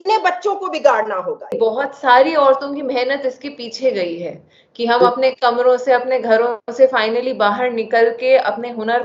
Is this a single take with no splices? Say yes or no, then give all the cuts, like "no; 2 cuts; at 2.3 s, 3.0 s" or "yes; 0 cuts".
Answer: no; 1 cut; at 1.6 s